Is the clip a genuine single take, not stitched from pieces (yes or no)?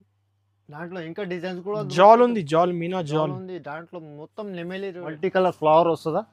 no